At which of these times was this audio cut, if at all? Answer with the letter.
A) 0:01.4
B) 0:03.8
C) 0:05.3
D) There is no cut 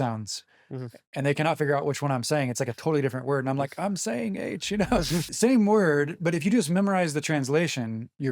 C